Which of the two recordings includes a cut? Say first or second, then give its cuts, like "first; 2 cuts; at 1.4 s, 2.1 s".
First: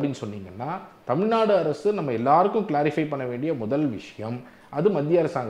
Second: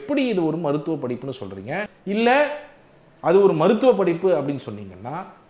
second; 1 cut; at 1.9 s